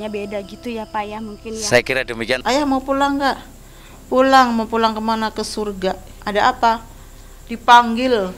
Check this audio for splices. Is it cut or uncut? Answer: cut